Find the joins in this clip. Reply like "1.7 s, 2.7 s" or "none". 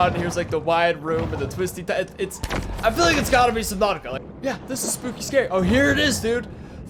4.1 s